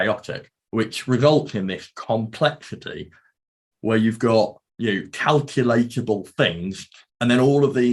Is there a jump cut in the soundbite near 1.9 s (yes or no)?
no